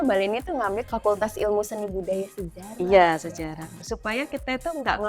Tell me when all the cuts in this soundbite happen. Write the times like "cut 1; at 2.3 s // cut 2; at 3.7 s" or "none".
cut 1; at 3.8 s